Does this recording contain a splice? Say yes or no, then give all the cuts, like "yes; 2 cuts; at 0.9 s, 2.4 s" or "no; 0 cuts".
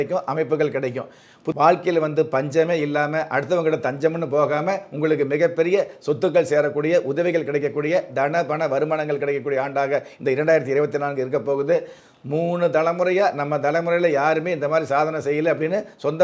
yes; 2 cuts; at 1.4 s, 12.0 s